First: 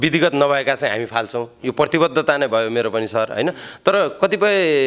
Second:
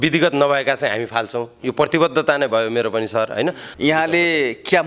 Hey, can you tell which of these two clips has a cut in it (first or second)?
second